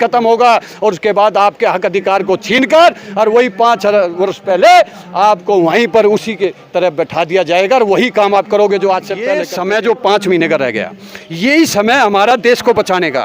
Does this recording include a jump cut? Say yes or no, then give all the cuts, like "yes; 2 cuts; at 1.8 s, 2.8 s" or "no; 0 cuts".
yes; 1 cut; at 9.5 s